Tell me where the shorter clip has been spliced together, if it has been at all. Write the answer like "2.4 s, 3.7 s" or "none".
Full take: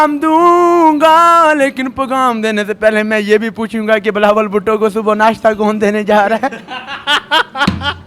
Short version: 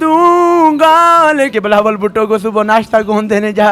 1.5 s